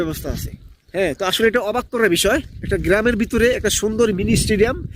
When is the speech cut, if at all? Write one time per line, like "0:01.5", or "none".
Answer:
0:02.6